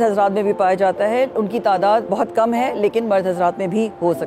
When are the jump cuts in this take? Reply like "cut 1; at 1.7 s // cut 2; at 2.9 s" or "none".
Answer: cut 1; at 2.1 s